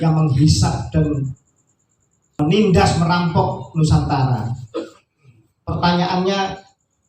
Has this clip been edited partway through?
yes; 1 cut; at 2.4 s

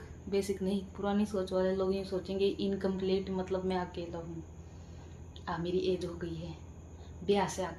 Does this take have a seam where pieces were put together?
no; 0 cuts

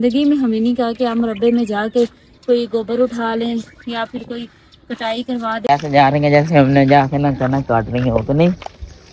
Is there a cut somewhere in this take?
yes; 1 cut; at 5.7 s

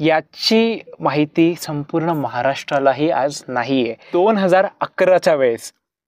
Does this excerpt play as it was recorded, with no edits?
no; 1 cut; at 4.0 s

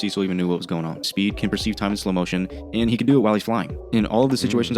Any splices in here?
yes; 1 cut; at 1.1 s

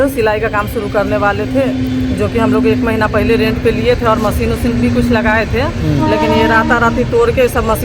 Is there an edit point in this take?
no; 0 cuts

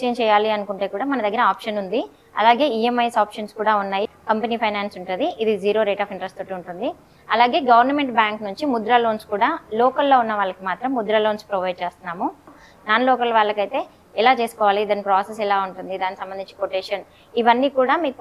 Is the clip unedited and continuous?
no; 2 cuts; at 4.0 s, 12.7 s

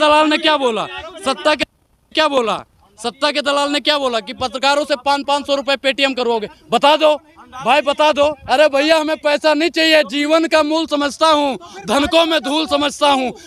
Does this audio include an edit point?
no; 0 cuts

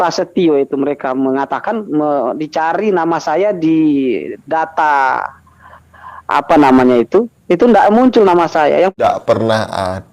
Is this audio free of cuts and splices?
no; 1 cut; at 9.0 s

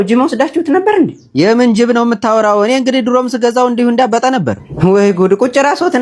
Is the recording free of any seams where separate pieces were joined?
yes; 0 cuts

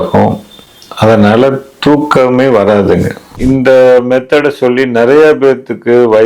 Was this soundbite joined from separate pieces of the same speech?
yes; 1 cut; at 3.4 s

